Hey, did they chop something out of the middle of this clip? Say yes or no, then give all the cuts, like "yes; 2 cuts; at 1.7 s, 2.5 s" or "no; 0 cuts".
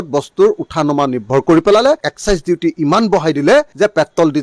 yes; 1 cut; at 2.0 s